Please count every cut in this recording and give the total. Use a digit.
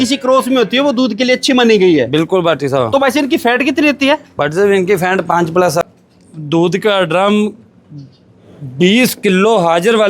1